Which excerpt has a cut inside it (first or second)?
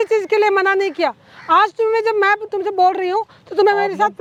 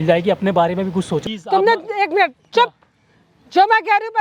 second